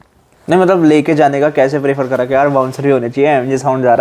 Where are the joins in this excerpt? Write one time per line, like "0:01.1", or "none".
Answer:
none